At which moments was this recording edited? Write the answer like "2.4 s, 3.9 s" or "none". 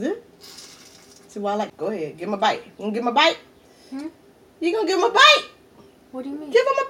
1.7 s

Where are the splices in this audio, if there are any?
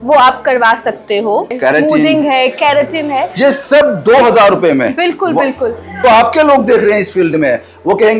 1.5 s, 5.9 s

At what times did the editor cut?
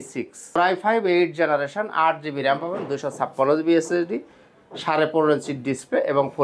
none

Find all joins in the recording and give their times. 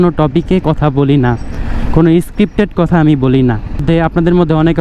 none

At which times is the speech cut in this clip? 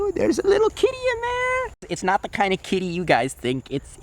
1.7 s

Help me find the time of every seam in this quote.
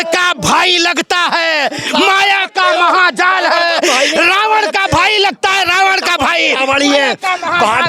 none

